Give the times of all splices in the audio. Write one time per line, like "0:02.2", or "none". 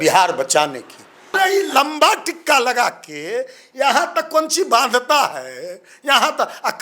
0:01.4

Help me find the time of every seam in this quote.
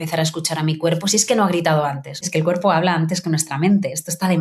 0:02.2

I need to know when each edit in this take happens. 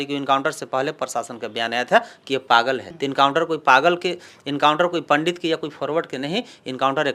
none

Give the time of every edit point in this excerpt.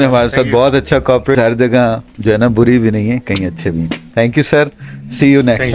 0:01.4

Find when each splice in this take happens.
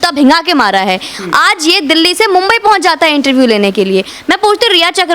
none

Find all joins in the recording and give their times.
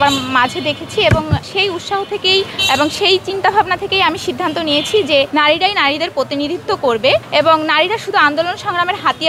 0:01.5
0:02.6
0:05.3
0:07.3

